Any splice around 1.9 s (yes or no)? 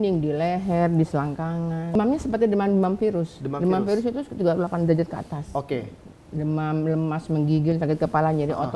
yes